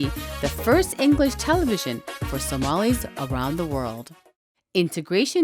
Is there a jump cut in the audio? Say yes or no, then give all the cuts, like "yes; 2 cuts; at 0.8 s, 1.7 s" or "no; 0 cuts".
yes; 1 cut; at 4.1 s